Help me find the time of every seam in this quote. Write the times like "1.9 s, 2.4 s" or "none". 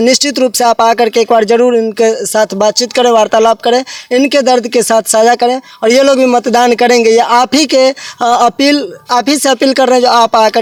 none